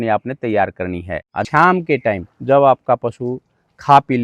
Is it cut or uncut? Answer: cut